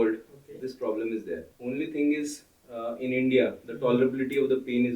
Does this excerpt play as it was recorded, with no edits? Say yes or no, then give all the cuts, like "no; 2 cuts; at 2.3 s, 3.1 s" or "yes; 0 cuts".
no; 1 cut; at 1.5 s